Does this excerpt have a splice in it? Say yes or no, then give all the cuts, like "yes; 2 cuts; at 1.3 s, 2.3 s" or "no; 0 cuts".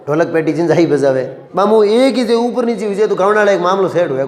yes; 1 cut; at 1.4 s